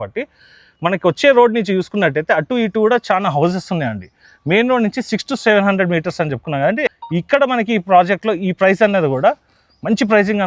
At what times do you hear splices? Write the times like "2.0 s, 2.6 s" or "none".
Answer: 6.9 s